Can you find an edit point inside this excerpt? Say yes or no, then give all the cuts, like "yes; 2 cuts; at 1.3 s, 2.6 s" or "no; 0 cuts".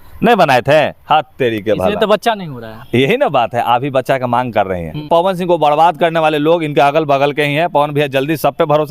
yes; 1 cut; at 5.0 s